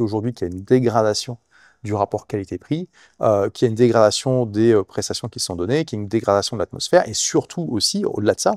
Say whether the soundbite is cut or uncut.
uncut